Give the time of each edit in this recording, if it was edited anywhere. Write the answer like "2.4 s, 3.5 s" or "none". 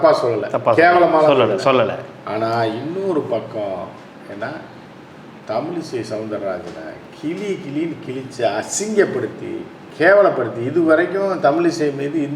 none